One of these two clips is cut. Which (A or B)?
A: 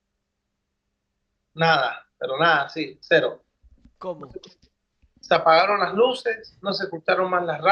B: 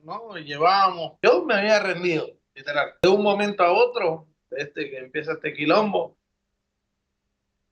B